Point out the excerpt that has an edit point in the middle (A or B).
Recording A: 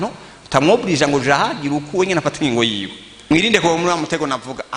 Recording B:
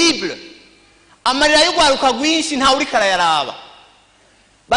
A